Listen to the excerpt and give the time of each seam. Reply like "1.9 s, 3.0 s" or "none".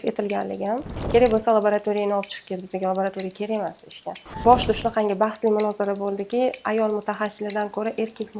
0.9 s, 4.2 s